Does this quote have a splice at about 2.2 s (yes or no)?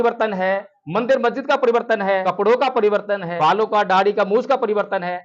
yes